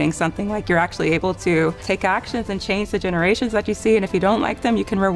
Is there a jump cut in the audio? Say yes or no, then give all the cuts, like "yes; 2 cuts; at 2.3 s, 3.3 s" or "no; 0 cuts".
yes; 1 cut; at 1.8 s